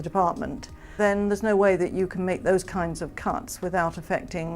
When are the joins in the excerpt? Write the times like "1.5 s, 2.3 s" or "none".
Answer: 0.9 s